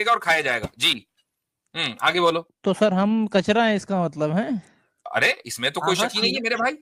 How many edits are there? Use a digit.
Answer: 1